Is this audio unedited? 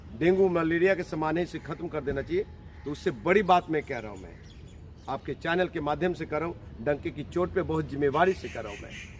yes; 0 cuts

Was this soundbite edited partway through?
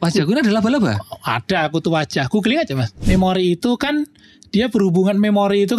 yes; 1 cut; at 2.9 s

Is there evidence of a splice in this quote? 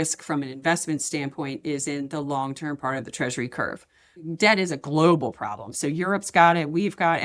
yes; 1 cut; at 4.1 s

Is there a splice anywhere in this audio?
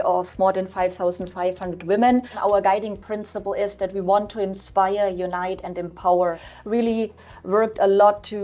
yes; 2 cuts; at 2.3 s, 6.4 s

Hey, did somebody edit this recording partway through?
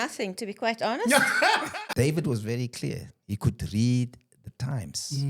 yes; 1 cut; at 1.7 s

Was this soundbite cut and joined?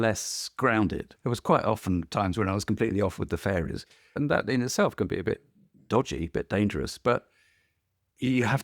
yes; 2 cuts; at 1.1 s, 4.2 s

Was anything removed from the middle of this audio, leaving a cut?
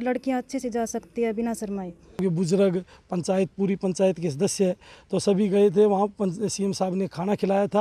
yes; 1 cut; at 2.2 s

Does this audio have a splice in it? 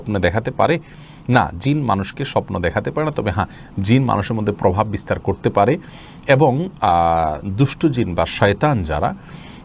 no; 0 cuts

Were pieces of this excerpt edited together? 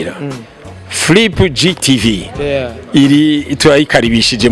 no; 0 cuts

